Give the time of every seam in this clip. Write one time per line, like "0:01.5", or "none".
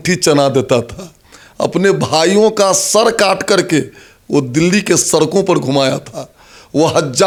none

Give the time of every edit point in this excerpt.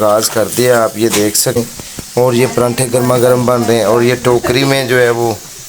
0:01.6

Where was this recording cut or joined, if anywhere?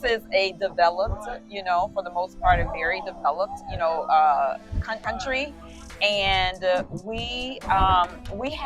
0:05.0

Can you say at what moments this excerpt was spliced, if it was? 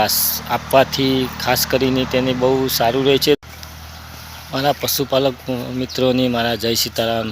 0:03.4

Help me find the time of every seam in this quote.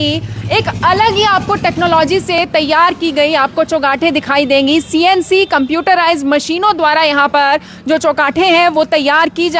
none

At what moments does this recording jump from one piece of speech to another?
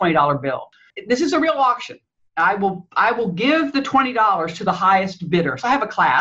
0:00.9

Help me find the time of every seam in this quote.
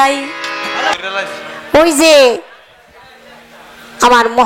0:00.9

